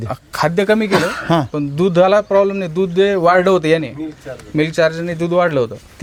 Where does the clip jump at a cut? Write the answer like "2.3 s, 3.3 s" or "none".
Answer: none